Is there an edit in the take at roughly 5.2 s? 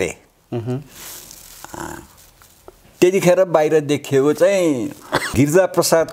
yes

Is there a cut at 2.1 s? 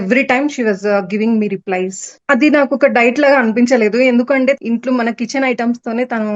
yes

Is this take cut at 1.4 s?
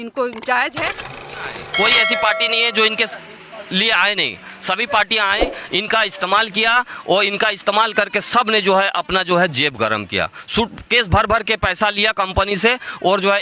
yes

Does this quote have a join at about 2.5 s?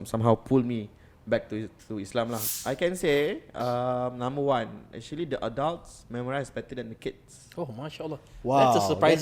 yes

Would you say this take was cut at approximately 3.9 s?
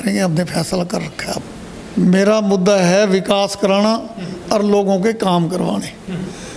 no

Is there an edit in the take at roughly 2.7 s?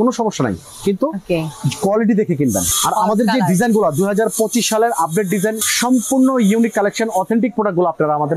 yes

